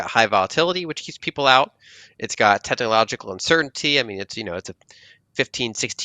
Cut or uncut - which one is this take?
uncut